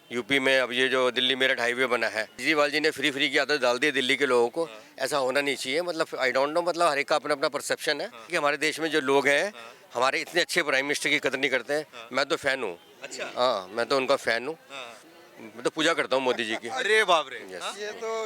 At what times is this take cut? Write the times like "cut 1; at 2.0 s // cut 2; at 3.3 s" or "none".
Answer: cut 1; at 2.4 s // cut 2; at 8.3 s